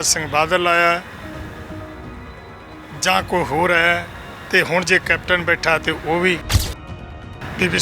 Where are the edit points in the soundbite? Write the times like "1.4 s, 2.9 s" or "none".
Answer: 6.9 s